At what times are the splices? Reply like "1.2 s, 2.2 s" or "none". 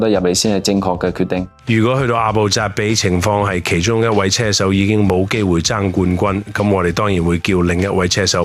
1.5 s